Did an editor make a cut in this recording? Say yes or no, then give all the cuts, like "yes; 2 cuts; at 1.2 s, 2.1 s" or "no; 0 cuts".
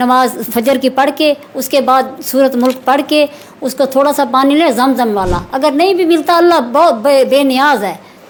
no; 0 cuts